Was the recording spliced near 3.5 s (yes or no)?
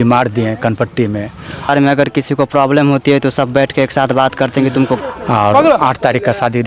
no